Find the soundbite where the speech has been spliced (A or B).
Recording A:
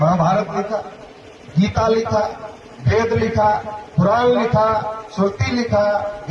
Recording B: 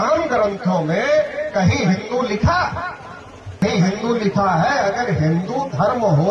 B